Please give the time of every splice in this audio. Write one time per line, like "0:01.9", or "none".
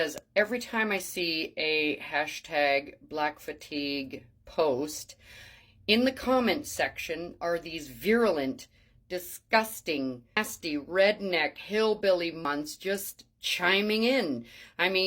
0:10.4
0:12.5